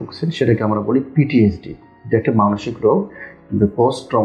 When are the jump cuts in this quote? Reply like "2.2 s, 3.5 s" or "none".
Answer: none